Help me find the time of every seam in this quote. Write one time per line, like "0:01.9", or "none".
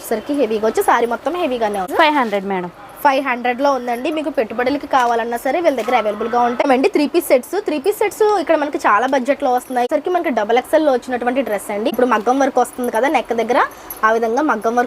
0:01.9
0:06.6
0:09.9
0:11.9